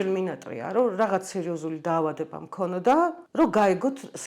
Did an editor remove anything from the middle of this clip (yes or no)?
yes